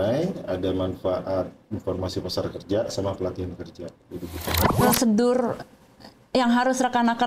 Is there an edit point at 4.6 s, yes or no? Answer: yes